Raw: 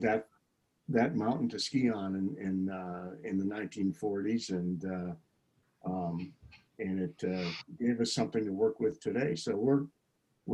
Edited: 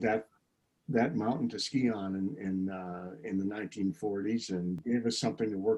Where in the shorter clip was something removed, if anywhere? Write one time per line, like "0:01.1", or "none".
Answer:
0:04.8